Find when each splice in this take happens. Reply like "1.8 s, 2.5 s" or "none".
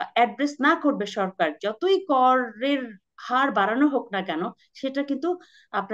none